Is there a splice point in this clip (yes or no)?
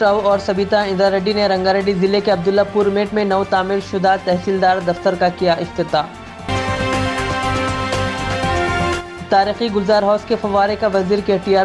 no